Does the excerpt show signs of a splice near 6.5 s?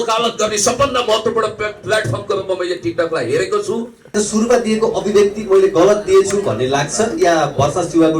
no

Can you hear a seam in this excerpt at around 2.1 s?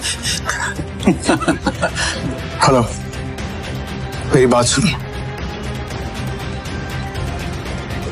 yes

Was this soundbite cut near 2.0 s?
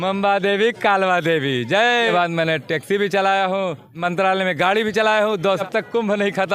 yes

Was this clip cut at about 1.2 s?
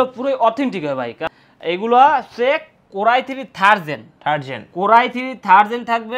yes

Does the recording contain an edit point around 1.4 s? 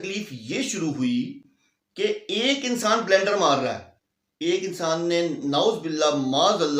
no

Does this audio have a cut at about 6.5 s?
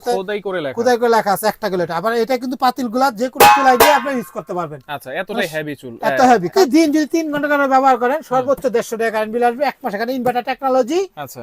yes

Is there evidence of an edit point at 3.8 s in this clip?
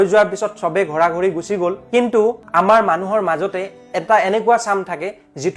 no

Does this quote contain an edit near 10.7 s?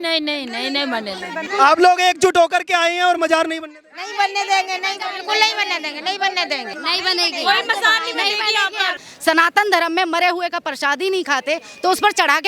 no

